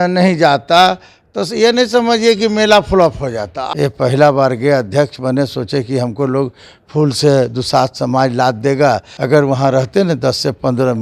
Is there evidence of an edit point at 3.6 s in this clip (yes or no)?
yes